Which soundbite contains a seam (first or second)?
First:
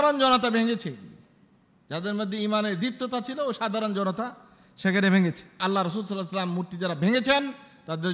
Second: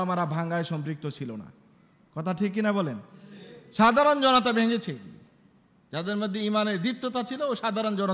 first